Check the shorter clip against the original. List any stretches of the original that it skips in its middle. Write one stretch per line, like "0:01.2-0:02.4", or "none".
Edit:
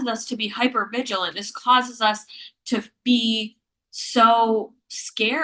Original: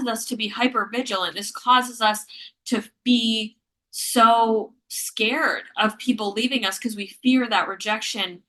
none